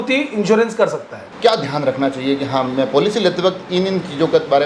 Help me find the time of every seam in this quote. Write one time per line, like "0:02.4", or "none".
0:01.2